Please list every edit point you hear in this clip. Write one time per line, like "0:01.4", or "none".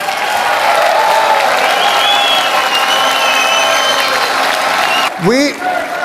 0:05.1